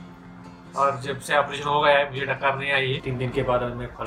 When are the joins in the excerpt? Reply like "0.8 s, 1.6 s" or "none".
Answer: 3.0 s